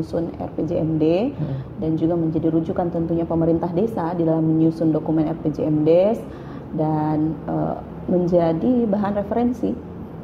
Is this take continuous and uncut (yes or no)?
yes